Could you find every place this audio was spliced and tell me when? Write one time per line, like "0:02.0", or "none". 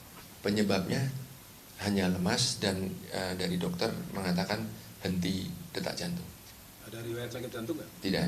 0:02.8
0:07.1